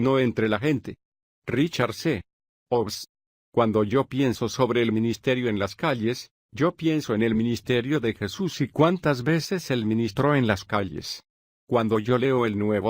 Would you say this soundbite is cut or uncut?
cut